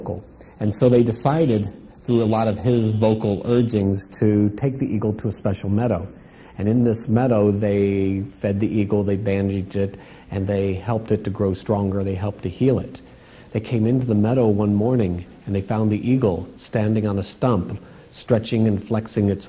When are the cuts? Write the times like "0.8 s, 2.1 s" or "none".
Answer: 5.9 s